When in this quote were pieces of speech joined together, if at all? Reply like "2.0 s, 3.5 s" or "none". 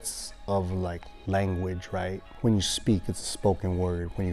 2.3 s